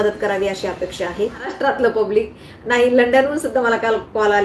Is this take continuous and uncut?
no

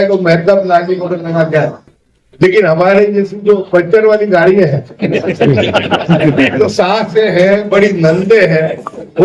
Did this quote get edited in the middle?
no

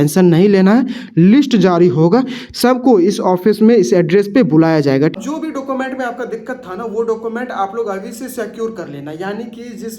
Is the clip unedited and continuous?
no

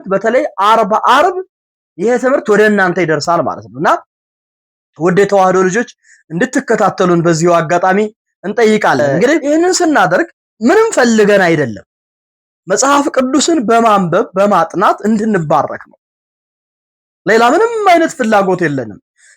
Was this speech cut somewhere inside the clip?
yes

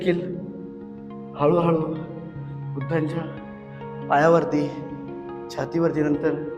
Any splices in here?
no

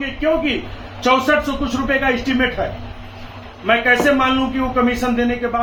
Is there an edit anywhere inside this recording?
no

